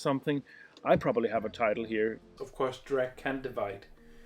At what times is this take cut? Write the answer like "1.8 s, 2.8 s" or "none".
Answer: 2.4 s